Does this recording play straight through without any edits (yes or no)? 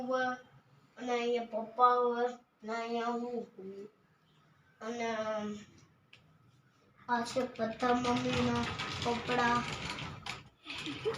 yes